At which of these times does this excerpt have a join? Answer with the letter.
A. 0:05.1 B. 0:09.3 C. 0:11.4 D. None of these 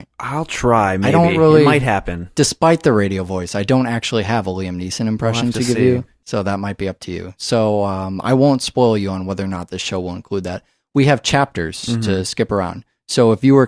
B